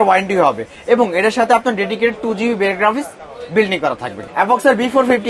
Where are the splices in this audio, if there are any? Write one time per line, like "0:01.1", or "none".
0:04.2